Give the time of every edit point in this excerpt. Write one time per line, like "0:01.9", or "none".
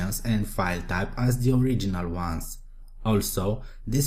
0:01.3